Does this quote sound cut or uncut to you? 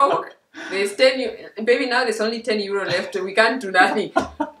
uncut